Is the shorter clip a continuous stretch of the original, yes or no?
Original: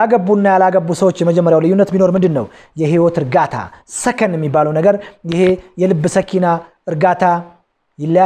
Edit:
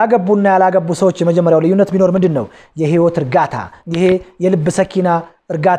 no